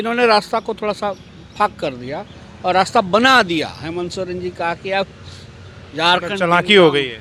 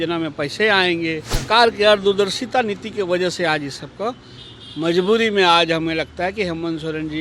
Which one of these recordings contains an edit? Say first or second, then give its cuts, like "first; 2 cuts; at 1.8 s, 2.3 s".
second; 1 cut; at 1.4 s